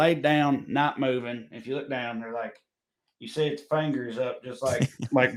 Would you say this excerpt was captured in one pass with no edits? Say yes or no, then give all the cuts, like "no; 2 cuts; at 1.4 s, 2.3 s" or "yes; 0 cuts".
yes; 0 cuts